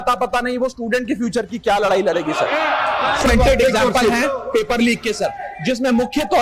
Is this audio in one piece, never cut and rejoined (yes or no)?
no